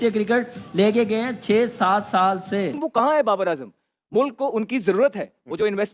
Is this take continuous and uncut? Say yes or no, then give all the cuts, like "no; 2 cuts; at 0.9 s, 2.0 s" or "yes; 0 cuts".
no; 1 cut; at 2.8 s